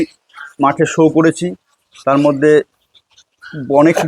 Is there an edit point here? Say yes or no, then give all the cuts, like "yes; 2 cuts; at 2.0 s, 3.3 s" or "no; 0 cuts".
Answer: no; 0 cuts